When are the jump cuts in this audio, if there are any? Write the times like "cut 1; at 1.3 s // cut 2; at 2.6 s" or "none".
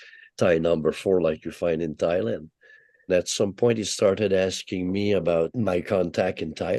cut 1; at 3.1 s // cut 2; at 5.5 s